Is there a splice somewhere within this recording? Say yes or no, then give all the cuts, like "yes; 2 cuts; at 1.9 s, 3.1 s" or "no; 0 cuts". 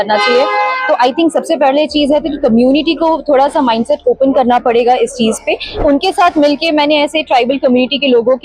yes; 1 cut; at 5.8 s